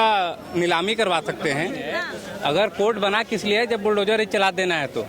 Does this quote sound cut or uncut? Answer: cut